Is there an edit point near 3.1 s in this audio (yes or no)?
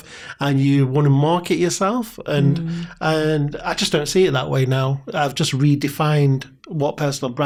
no